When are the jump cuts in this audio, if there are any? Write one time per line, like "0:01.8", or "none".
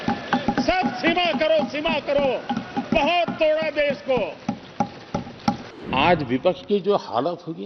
0:05.7